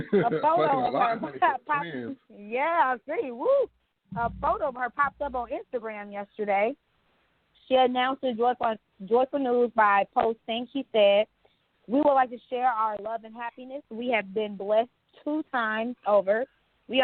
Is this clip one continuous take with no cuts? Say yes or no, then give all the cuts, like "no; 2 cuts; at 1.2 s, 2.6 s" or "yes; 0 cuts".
yes; 0 cuts